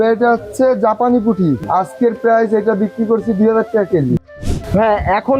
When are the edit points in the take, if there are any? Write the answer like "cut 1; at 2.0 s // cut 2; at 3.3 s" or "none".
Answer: cut 1; at 1.6 s // cut 2; at 4.2 s